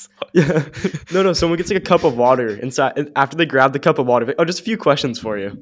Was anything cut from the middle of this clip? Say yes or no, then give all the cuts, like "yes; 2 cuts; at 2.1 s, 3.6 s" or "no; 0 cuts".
no; 0 cuts